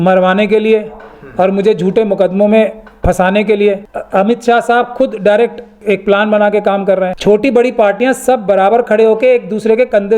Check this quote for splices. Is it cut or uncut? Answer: cut